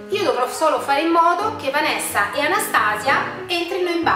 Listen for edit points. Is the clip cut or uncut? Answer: uncut